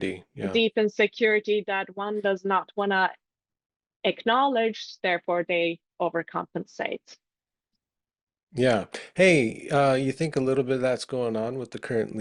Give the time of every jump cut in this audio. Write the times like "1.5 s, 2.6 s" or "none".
none

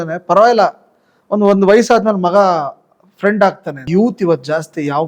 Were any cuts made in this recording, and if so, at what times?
3.8 s

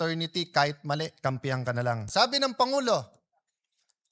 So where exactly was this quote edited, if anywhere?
2.1 s

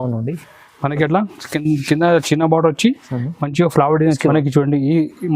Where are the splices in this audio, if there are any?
4.2 s

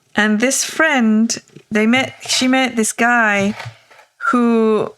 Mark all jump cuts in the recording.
1.7 s

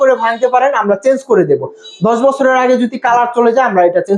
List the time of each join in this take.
none

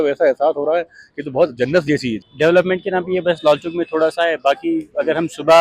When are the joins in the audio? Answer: 2.3 s

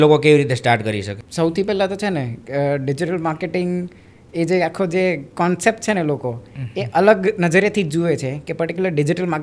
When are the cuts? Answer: 1.2 s

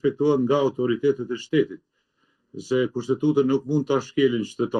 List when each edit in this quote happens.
none

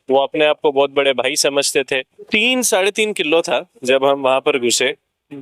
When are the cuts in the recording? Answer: 2.2 s

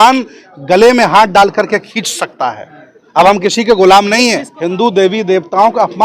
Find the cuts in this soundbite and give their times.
4.5 s

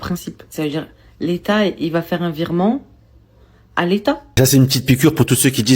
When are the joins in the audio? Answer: 4.3 s

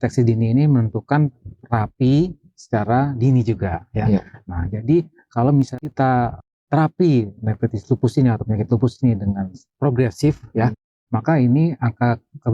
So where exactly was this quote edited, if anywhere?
5.8 s

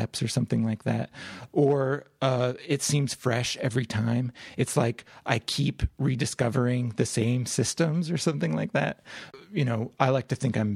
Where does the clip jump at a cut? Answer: 9.3 s

